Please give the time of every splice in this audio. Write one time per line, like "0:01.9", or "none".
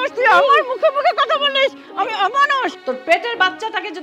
0:02.8